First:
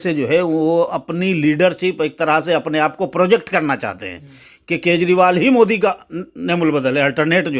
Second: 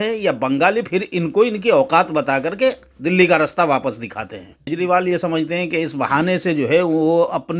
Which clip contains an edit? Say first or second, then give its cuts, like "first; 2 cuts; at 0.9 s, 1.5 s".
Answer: second; 1 cut; at 4.6 s